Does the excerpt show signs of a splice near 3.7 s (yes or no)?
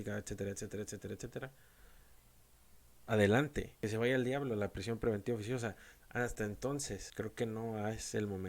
yes